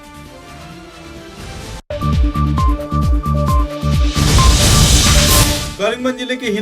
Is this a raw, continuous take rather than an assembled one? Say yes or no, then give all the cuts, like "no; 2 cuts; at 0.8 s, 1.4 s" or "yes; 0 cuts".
no; 1 cut; at 5.6 s